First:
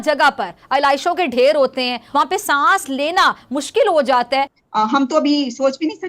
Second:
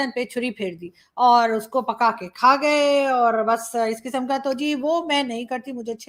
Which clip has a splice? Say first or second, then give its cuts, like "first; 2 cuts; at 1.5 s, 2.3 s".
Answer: first; 2 cuts; at 2.0 s, 4.6 s